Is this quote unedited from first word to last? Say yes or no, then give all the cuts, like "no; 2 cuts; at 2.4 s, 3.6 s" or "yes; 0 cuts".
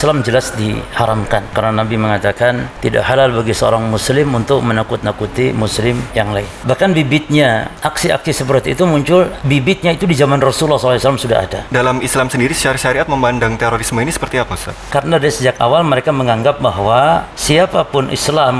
no; 8 cuts; at 1.5 s, 2.7 s, 6.1 s, 7.7 s, 9.4 s, 11.6 s, 14.9 s, 17.3 s